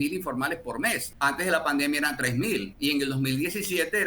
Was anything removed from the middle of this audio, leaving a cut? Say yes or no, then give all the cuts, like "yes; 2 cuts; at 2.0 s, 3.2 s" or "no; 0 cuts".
yes; 2 cuts; at 1.1 s, 2.7 s